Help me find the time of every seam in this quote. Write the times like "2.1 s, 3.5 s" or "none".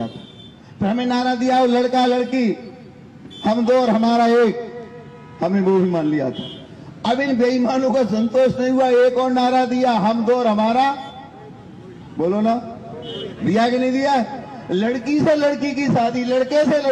13.8 s